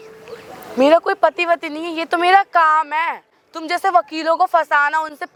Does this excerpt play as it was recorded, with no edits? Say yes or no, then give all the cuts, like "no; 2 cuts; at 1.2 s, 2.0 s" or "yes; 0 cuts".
yes; 0 cuts